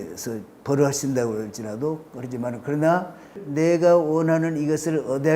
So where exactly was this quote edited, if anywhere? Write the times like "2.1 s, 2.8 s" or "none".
3.4 s